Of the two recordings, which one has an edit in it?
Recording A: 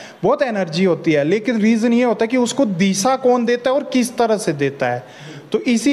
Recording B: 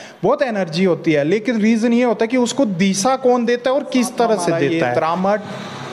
B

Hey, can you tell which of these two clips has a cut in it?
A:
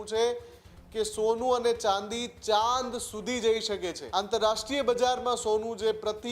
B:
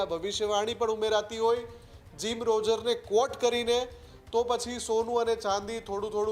A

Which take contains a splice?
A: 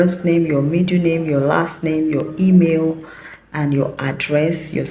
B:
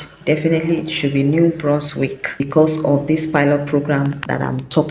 B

